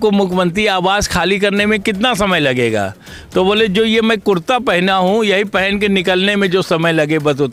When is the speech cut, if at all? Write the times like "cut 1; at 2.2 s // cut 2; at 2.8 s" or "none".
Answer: none